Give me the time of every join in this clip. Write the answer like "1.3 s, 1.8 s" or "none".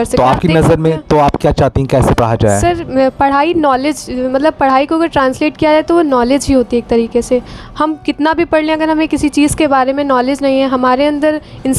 none